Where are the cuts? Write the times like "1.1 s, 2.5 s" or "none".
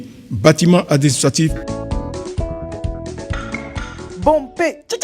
1.6 s